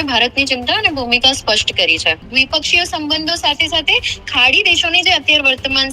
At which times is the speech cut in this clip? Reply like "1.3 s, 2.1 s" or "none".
2.3 s